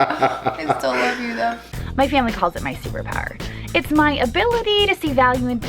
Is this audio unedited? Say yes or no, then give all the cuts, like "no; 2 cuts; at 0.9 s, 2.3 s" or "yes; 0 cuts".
no; 1 cut; at 1.7 s